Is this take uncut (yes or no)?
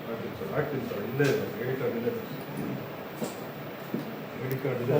yes